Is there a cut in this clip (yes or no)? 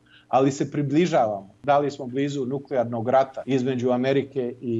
yes